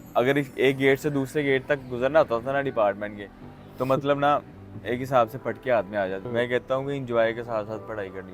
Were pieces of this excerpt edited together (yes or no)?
yes